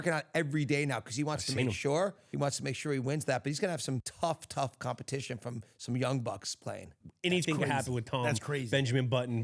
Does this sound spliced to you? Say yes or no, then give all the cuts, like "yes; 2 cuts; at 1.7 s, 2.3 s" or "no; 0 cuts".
yes; 3 cuts; at 2.2 s, 4.1 s, 7.0 s